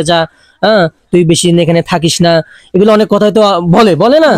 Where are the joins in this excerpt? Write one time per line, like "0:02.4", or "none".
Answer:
none